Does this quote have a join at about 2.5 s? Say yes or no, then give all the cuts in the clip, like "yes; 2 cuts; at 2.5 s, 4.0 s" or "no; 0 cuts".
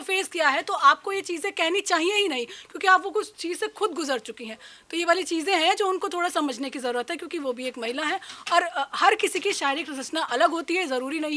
no; 0 cuts